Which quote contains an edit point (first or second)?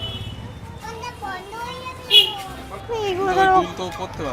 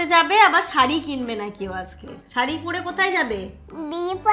first